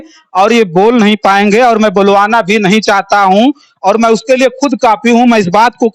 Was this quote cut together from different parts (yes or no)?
no